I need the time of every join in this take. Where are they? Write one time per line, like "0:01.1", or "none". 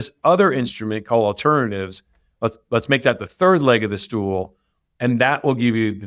none